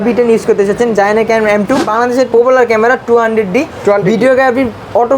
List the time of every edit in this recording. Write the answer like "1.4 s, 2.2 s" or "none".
1.9 s